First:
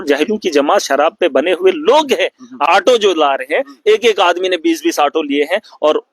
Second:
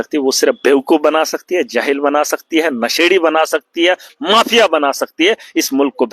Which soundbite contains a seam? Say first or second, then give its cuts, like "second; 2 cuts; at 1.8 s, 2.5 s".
first; 1 cut; at 2.7 s